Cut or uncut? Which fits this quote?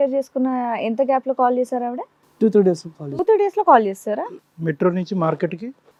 uncut